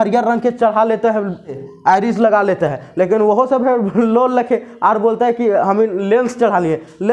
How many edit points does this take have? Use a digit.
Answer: 1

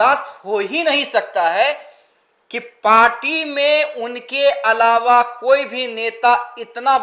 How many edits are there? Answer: 0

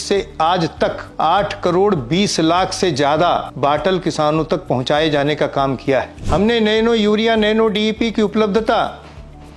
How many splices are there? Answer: 3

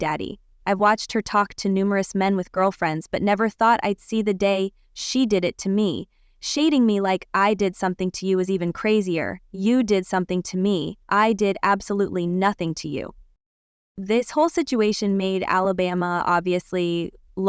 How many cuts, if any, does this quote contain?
0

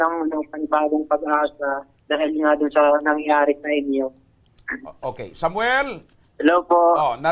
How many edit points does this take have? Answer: 0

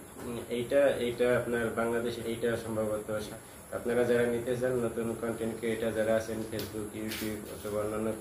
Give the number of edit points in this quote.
2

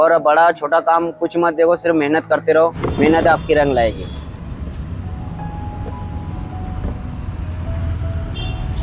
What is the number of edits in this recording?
0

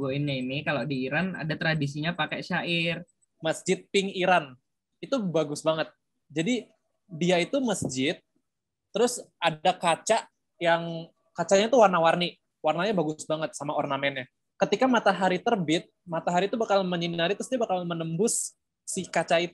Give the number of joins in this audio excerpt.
1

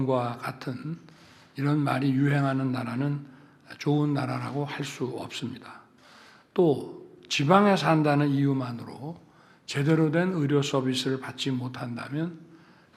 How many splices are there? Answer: 0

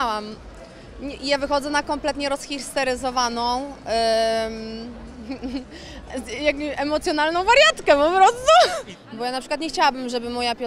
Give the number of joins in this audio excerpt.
1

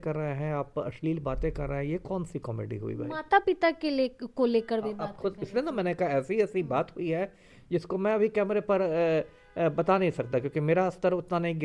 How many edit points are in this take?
0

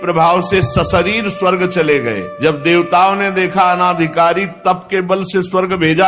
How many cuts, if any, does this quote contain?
1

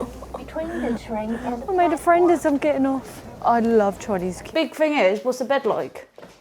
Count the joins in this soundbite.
1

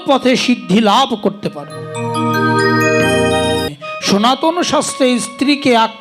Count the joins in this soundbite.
1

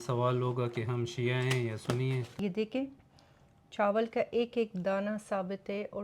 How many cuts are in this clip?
1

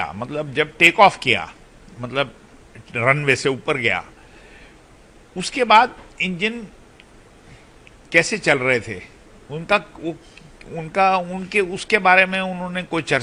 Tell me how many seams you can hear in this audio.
0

